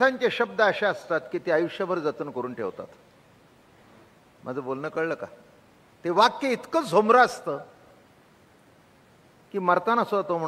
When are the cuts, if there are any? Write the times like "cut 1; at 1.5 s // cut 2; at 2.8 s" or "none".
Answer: none